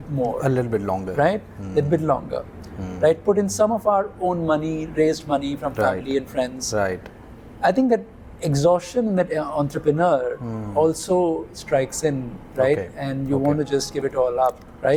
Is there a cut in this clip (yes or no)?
no